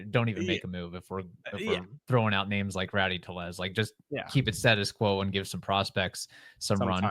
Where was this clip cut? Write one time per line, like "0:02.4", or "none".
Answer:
none